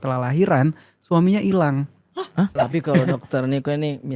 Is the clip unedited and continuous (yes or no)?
no